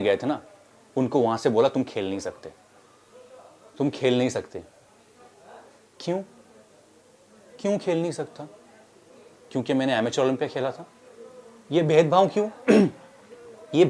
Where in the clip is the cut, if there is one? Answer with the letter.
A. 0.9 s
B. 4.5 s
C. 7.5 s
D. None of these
D